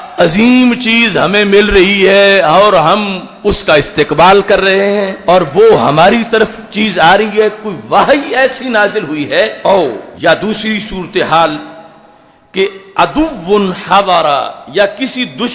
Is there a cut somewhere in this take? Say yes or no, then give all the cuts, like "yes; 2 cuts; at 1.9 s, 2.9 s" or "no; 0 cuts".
no; 0 cuts